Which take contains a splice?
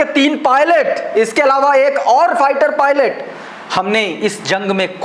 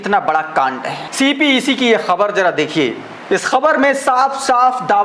second; 1 cut; at 1.1 s

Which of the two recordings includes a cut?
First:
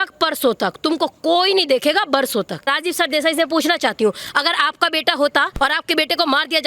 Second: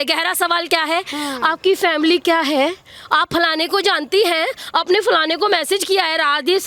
first; 1 cut; at 2.7 s

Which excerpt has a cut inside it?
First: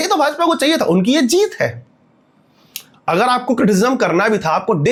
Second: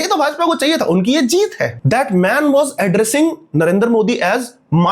second; 1 cut; at 1.8 s

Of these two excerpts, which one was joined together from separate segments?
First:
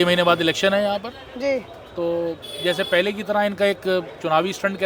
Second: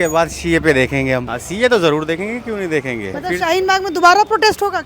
second; 2 cuts; at 1.4 s, 3.2 s

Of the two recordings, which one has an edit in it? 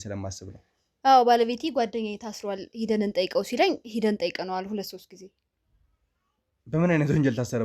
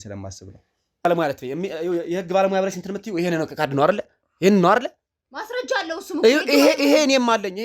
second; 1 cut; at 1.1 s

